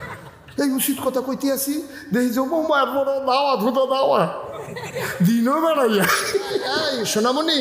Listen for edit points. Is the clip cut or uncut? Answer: cut